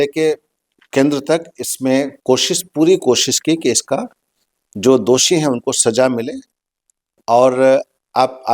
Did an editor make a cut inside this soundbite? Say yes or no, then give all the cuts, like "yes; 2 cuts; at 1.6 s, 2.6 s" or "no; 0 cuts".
no; 0 cuts